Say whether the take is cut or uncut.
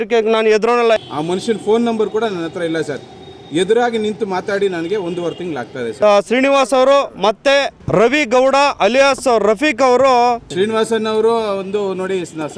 cut